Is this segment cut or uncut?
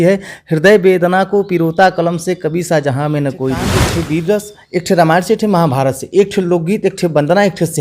cut